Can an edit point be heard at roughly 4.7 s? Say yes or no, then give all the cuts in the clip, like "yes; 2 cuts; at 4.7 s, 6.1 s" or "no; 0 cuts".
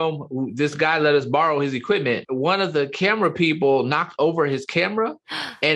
no; 1 cut; at 2.2 s